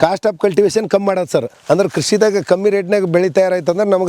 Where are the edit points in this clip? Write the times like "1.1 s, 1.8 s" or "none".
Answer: 1.5 s